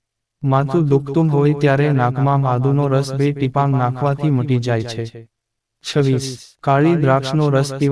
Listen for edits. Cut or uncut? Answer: uncut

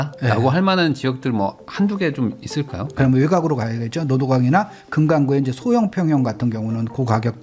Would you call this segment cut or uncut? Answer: cut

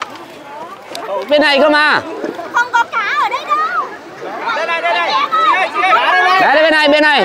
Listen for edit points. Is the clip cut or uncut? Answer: cut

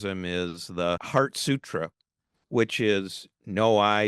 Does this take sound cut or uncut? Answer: cut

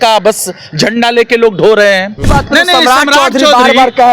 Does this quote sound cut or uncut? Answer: cut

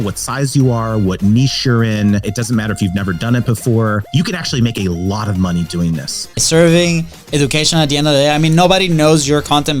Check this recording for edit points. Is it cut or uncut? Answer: cut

